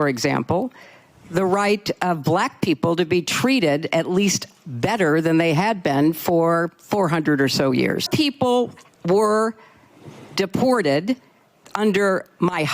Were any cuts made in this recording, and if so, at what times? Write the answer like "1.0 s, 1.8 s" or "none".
8.1 s